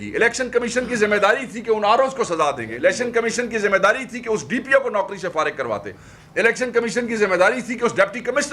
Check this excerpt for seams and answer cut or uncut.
uncut